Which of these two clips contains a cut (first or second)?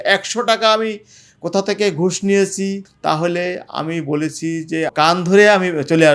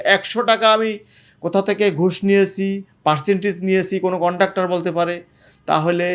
first